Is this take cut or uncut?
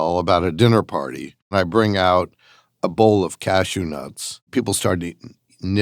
cut